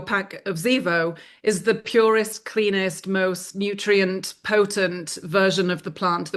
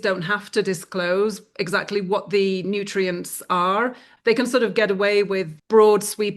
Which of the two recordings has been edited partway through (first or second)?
second